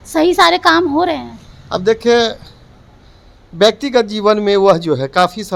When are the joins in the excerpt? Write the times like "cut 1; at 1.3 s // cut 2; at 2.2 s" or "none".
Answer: none